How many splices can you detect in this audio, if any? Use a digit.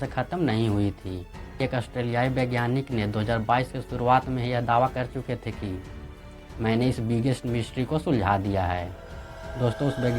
1